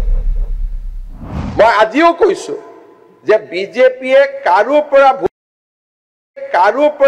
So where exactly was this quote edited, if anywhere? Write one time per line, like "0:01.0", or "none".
none